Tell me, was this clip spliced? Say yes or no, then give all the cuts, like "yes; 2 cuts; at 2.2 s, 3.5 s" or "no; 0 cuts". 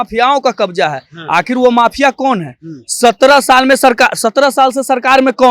no; 0 cuts